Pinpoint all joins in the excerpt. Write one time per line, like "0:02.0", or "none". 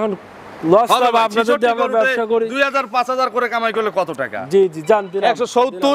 none